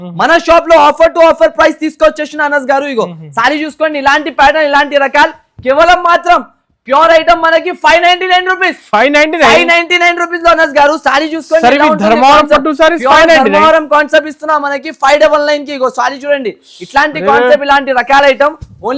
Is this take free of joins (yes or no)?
yes